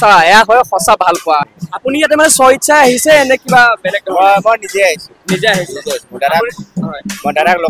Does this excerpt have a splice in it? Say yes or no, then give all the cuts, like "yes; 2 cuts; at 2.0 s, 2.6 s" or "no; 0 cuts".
yes; 1 cut; at 1.5 s